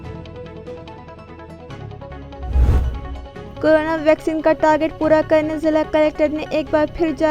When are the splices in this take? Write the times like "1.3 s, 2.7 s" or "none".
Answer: 2.7 s